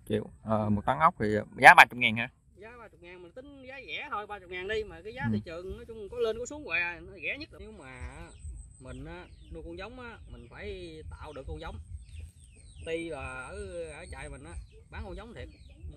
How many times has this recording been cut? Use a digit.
1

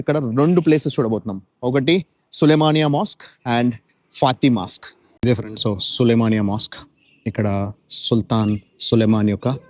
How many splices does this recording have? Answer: 1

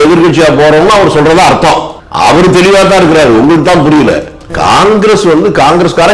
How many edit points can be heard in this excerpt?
2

